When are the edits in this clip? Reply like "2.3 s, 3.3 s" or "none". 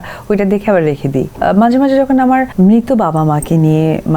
1.3 s, 2.5 s